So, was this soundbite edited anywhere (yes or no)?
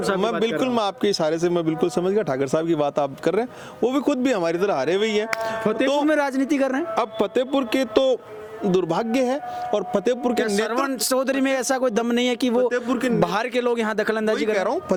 no